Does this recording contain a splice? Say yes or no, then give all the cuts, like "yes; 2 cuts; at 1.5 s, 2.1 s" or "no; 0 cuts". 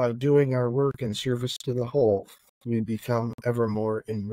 no; 0 cuts